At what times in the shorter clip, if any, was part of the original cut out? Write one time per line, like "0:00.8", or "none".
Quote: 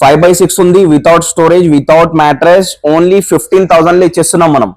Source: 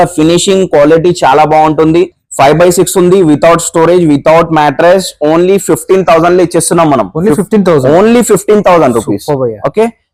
none